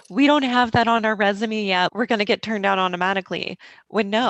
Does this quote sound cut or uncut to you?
cut